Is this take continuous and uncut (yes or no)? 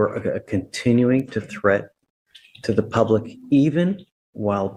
yes